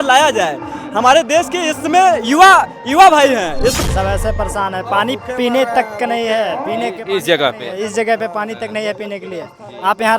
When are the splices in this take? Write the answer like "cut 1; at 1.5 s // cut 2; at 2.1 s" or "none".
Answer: cut 1; at 3.8 s